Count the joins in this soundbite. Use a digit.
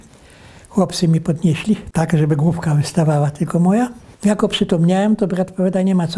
2